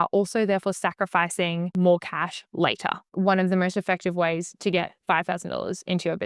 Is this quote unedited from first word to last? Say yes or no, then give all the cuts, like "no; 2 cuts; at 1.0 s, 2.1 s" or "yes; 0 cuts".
no; 2 cuts; at 1.7 s, 3.1 s